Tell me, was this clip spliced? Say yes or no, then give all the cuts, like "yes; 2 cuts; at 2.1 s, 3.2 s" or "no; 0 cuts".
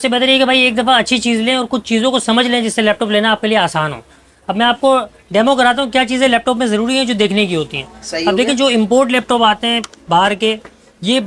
no; 0 cuts